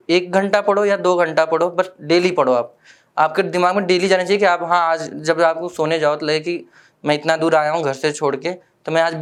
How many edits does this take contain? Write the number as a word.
zero